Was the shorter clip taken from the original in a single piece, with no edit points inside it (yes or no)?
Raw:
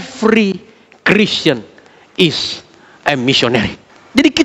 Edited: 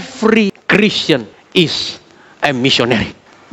no